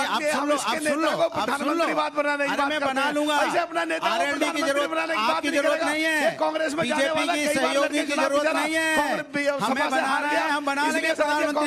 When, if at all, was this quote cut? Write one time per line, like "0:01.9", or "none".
none